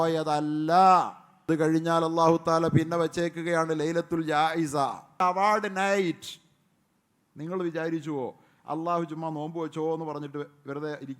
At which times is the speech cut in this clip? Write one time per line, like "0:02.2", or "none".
0:01.3
0:05.2